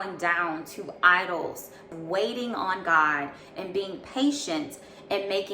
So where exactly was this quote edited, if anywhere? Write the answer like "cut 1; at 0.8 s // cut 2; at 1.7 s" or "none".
cut 1; at 1.9 s